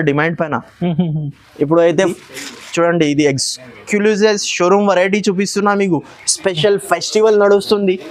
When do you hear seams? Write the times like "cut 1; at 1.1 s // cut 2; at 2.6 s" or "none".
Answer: cut 1; at 2.1 s